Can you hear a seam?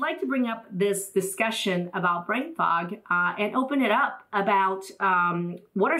no; 0 cuts

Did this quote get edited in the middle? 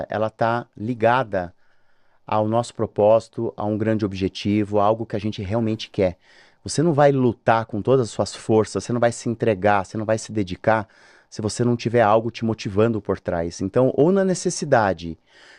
no; 0 cuts

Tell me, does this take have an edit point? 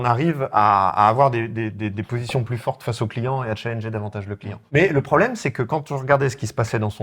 no; 0 cuts

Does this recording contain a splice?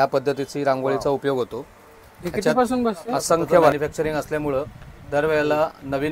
yes; 1 cut; at 3.7 s

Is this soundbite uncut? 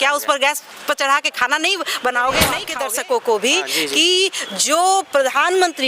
no; 1 cut; at 2.7 s

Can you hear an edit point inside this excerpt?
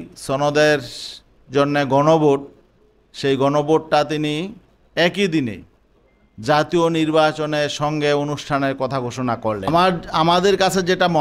yes; 1 cut; at 10.0 s

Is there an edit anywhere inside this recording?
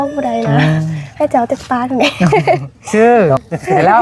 yes; 1 cut; at 2.9 s

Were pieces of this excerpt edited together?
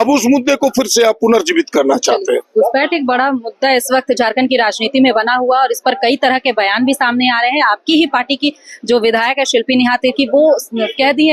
no; 0 cuts

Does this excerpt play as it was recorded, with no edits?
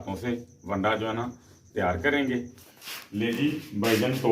no; 1 cut; at 2.6 s

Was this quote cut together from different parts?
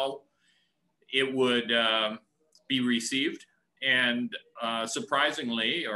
no; 0 cuts

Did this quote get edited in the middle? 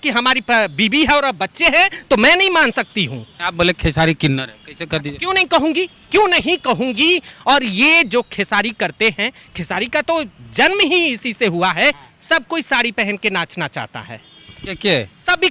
yes; 3 cuts; at 3.4 s, 7.3 s, 12.1 s

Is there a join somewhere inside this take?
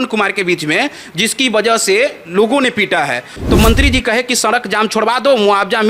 yes; 1 cut; at 3.3 s

